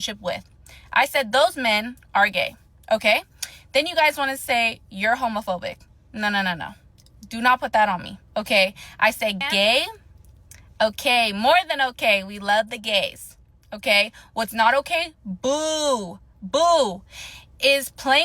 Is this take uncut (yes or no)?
no